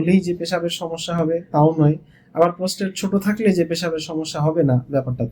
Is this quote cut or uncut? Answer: uncut